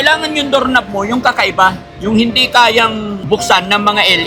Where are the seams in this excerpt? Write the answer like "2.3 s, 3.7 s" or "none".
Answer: 3.1 s